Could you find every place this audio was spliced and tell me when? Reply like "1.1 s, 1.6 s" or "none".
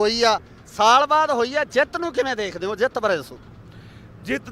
1.0 s, 2.8 s